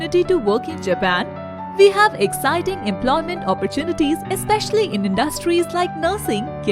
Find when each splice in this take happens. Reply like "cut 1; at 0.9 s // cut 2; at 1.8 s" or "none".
none